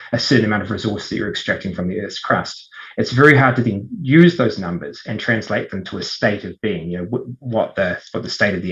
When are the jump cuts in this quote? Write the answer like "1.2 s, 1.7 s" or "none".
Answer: none

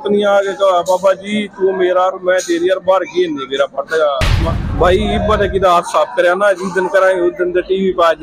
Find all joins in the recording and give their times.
4.4 s

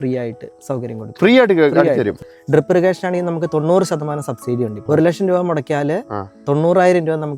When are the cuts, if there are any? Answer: 2.2 s, 4.8 s

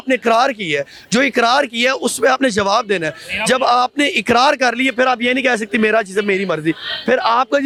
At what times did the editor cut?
none

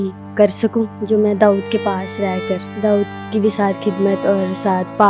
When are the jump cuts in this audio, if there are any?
1.0 s, 2.7 s

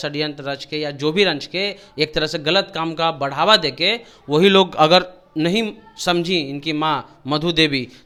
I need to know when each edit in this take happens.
none

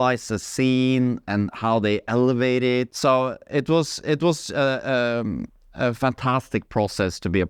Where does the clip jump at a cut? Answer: 2.9 s

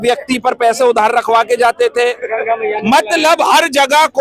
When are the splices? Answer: none

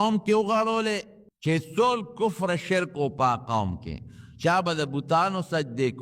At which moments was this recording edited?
1.7 s

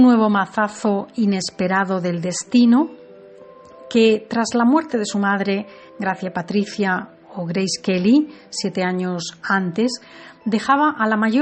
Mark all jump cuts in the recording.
9.2 s

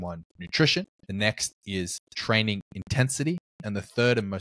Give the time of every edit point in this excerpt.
1.0 s

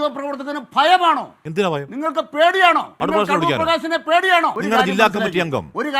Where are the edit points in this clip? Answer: 2.9 s, 4.6 s

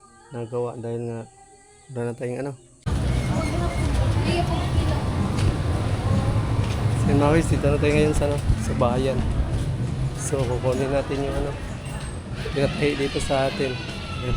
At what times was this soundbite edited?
2.9 s

